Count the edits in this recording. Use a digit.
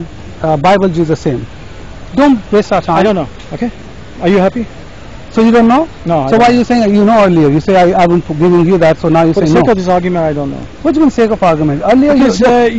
0